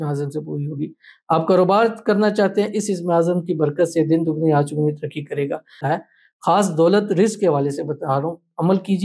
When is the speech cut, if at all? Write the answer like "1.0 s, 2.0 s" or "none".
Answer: 5.7 s